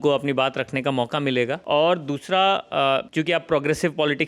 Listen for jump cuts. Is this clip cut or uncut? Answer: cut